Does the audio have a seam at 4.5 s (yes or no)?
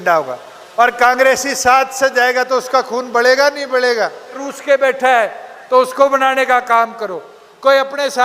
yes